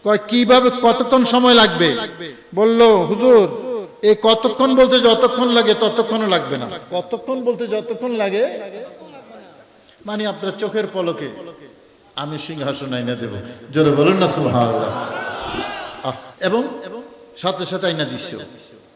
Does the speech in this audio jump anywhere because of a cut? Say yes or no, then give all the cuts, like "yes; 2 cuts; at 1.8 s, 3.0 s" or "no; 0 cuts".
yes; 2 cuts; at 6.8 s, 16.3 s